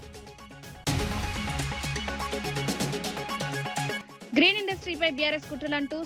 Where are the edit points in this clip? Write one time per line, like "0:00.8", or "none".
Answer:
0:00.8
0:02.4
0:04.1